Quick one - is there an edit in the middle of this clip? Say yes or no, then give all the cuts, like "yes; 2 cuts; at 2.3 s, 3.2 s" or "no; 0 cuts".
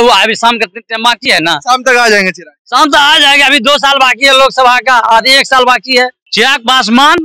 yes; 1 cut; at 6.2 s